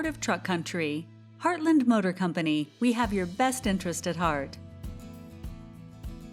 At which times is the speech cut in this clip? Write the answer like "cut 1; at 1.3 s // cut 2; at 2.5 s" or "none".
cut 1; at 4.5 s